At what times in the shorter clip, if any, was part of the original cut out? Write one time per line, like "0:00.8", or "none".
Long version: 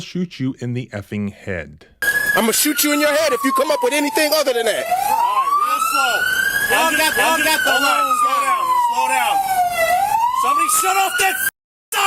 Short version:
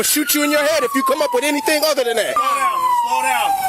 0:02.3